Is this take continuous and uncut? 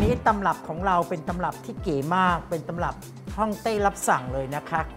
yes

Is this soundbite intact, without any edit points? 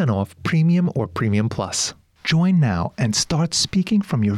no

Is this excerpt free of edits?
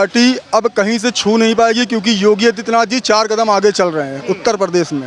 yes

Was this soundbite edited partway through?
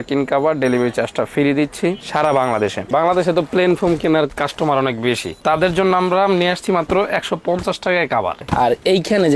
yes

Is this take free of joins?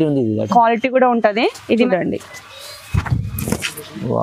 no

